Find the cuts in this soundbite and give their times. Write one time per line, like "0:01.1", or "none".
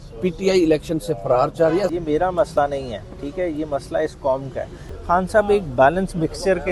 0:01.9
0:04.9